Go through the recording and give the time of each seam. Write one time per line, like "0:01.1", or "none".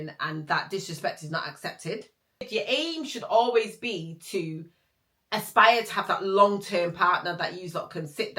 0:02.5